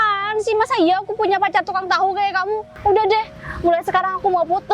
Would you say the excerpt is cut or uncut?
cut